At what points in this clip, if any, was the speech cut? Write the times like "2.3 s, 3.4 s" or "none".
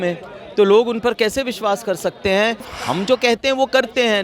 2.8 s